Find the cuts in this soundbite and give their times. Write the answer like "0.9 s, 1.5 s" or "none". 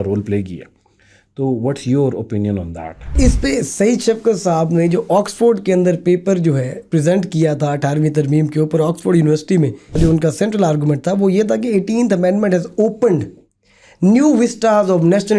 3.1 s, 10.0 s

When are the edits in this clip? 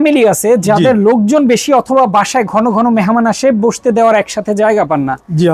none

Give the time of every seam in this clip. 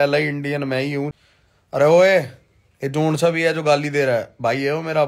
1.2 s

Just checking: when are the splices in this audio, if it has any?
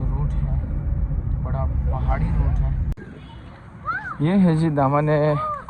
2.9 s

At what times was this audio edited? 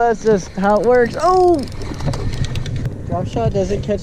2.9 s

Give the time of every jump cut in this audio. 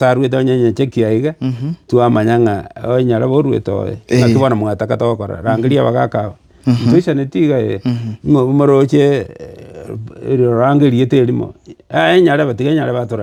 none

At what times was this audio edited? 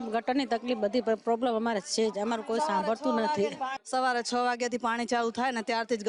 3.8 s

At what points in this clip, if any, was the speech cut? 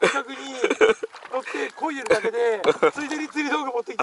none

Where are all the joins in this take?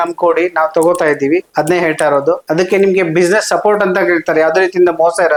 none

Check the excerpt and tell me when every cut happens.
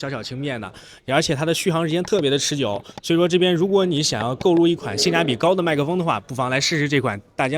none

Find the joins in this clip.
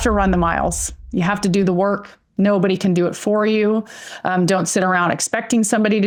none

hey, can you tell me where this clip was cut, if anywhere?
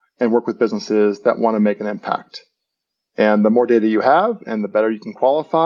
none

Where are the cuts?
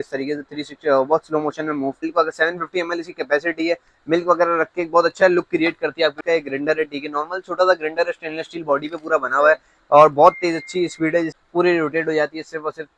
2.0 s, 6.2 s, 11.3 s

